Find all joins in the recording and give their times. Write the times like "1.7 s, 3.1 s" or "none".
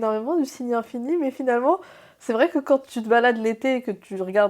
2.9 s